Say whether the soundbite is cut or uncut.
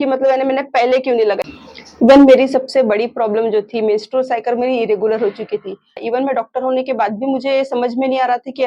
cut